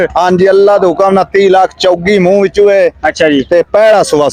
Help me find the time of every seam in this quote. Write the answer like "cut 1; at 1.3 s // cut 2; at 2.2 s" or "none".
none